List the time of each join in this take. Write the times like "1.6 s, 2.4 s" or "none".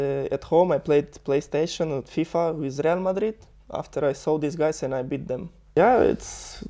5.8 s